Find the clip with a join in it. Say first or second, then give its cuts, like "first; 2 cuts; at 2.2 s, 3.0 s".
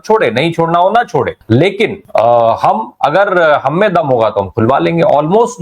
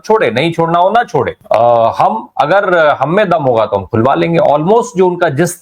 second; 1 cut; at 1.4 s